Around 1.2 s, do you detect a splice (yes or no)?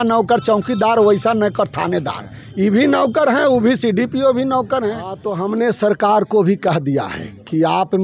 no